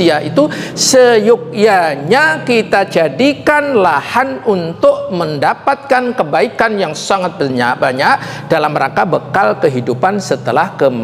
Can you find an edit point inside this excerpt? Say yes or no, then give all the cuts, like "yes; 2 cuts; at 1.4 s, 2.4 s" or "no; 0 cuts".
no; 0 cuts